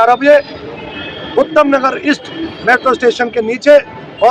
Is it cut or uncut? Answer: uncut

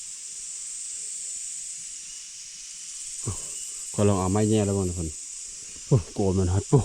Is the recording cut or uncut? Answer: uncut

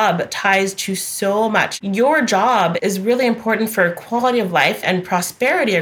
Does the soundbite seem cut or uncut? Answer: cut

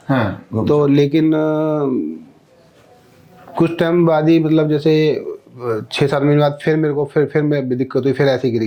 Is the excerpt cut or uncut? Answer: uncut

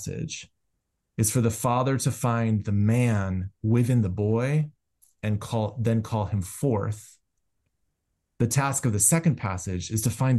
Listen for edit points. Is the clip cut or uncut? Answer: uncut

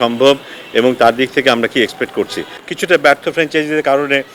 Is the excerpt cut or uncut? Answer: cut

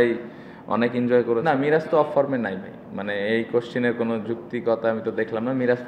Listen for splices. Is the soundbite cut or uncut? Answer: cut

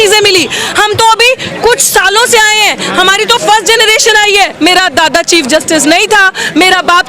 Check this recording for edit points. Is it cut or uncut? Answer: cut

